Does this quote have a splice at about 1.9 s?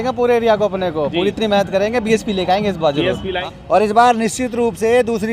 no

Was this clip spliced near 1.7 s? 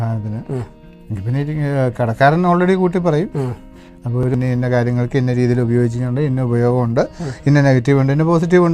no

